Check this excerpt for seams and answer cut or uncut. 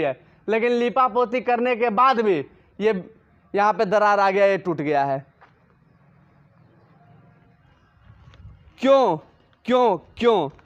uncut